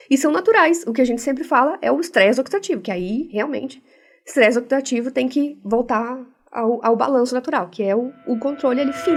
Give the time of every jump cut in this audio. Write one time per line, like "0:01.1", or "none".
none